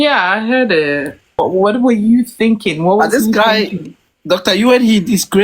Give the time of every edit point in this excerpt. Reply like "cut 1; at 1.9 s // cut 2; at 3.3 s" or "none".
cut 1; at 1.4 s

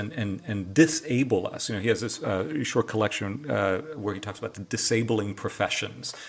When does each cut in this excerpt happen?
none

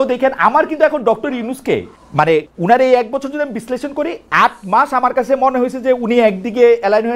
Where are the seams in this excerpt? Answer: cut 1; at 2.3 s

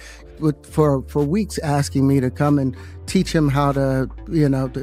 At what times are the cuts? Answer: none

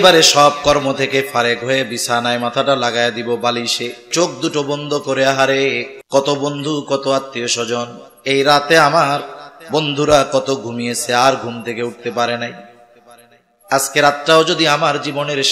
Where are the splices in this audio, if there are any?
cut 1; at 4.1 s // cut 2; at 5.9 s

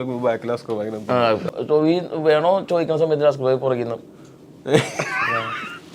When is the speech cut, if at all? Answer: cut 1; at 1.5 s

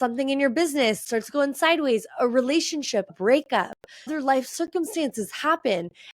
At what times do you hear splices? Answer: cut 1; at 1.0 s // cut 2; at 3.1 s

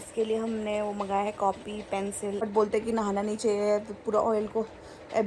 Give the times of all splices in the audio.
cut 1; at 2.4 s

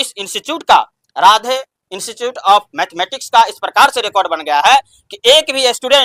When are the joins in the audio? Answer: none

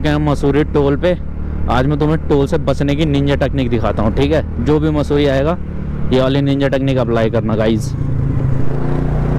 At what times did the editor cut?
none

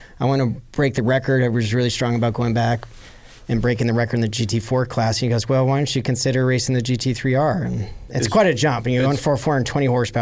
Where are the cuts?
cut 1; at 8.0 s

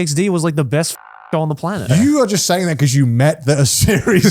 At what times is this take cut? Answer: cut 1; at 1.9 s

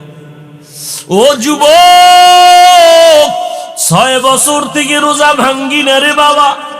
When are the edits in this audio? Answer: cut 1; at 3.7 s

